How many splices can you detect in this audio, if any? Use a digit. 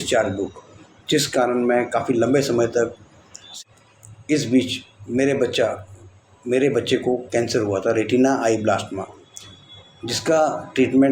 1